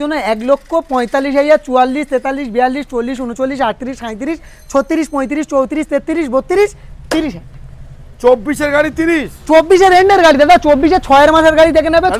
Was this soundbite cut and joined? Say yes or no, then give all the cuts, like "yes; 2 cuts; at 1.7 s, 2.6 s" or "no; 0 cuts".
no; 0 cuts